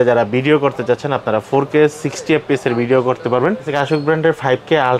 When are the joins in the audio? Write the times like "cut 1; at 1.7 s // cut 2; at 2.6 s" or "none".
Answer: cut 1; at 3.7 s